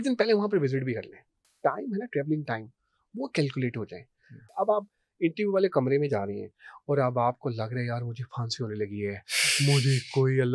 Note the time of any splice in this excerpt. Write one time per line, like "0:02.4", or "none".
0:01.4
0:04.5